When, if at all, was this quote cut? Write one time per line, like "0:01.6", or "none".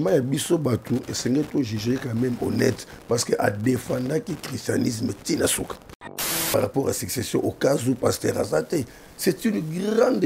0:06.5